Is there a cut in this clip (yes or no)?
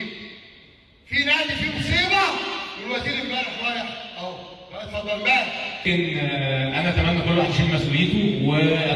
yes